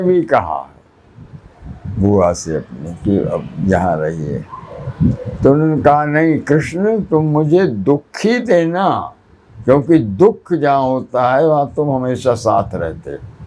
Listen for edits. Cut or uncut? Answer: uncut